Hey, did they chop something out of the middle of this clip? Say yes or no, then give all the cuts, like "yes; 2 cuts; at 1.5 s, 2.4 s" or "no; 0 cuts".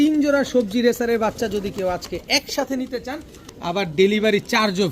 yes; 1 cut; at 3.5 s